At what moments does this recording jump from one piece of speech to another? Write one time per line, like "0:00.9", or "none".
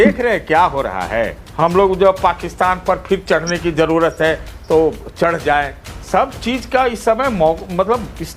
0:01.4

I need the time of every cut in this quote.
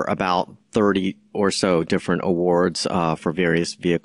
none

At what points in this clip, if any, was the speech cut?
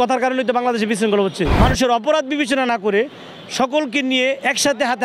0:01.5

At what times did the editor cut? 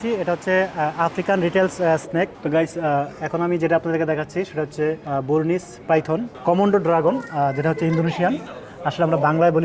0:02.1
0:05.0
0:06.3

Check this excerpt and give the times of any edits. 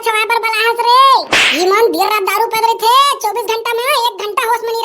none

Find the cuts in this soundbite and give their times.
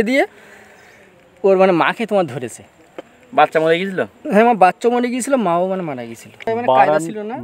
0:06.5

